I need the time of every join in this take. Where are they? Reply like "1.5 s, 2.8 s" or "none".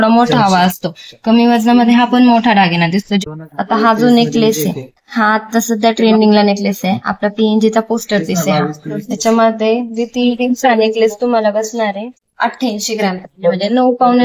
3.2 s, 12.2 s